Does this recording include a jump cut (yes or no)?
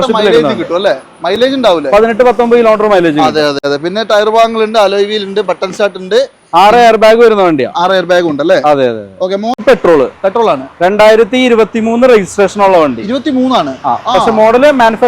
yes